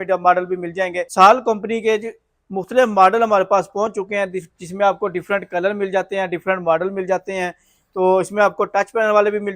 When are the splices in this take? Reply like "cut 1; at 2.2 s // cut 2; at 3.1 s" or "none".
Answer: cut 1; at 1.1 s